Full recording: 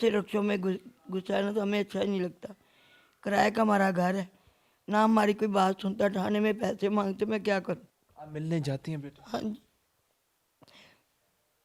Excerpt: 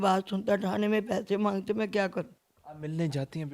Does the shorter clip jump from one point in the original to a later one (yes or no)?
no